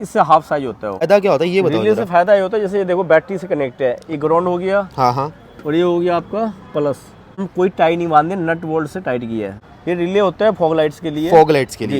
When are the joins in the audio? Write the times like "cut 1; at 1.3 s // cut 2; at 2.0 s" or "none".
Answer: cut 1; at 1.1 s // cut 2; at 7.5 s // cut 3; at 9.6 s